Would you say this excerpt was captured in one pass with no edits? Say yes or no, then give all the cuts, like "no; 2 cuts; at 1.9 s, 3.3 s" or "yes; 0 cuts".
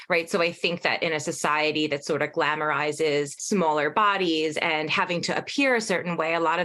no; 1 cut; at 3.4 s